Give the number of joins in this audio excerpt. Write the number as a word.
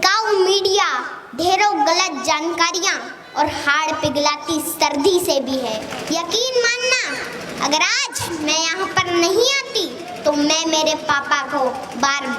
one